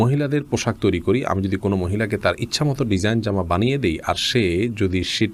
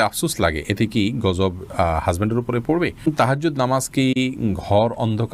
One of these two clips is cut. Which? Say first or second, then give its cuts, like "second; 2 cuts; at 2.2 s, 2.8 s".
second; 1 cut; at 3.1 s